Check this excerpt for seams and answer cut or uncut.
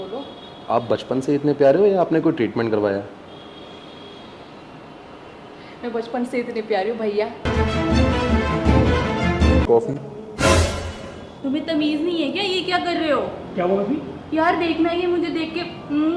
cut